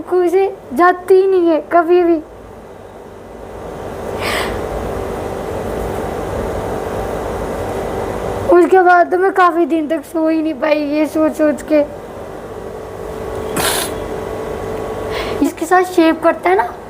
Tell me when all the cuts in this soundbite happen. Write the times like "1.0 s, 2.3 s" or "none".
15.5 s